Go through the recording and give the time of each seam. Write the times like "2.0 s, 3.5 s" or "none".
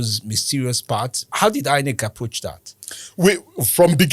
1.2 s